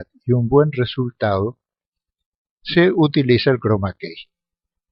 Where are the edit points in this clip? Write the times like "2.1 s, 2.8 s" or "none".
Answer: 3.5 s